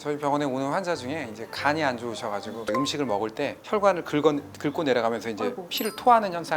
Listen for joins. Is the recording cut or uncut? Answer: cut